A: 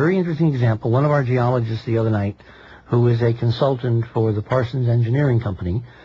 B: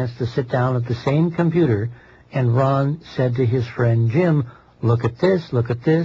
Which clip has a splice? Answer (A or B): A